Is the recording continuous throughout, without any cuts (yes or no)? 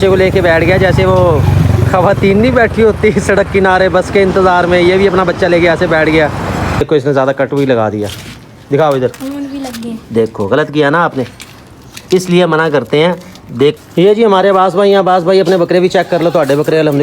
no